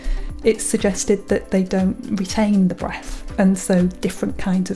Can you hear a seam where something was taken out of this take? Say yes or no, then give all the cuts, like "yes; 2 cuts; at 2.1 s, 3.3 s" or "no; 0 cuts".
yes; 1 cut; at 3.2 s